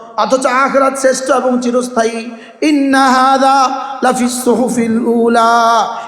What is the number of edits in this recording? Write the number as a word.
zero